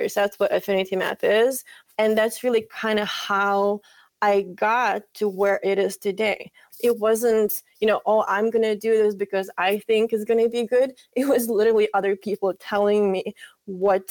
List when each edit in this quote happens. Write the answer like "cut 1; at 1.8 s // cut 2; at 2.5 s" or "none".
cut 1; at 1.7 s // cut 2; at 6.6 s